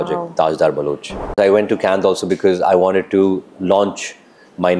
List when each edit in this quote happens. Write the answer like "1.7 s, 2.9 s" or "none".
1.4 s